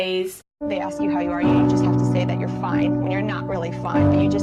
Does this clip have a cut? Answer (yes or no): no